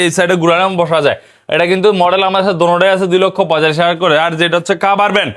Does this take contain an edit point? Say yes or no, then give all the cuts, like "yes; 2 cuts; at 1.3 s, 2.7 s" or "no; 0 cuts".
no; 0 cuts